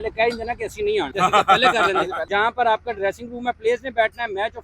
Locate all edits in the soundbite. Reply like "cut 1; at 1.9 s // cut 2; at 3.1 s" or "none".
cut 1; at 1.1 s // cut 2; at 2.2 s